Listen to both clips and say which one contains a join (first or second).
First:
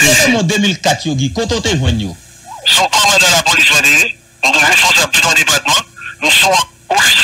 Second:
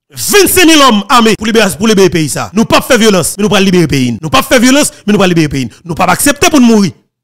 second